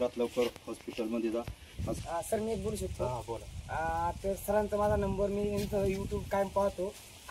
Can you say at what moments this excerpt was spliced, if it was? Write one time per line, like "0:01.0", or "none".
0:02.0